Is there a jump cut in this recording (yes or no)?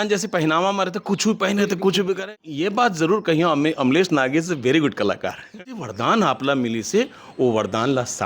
yes